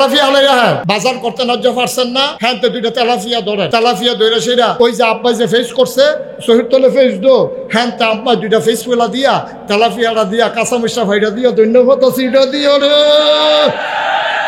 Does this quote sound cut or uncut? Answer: cut